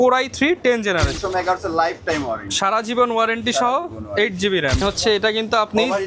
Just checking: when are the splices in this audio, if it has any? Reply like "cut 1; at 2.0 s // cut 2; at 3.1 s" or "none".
cut 1; at 1.2 s // cut 2; at 4.8 s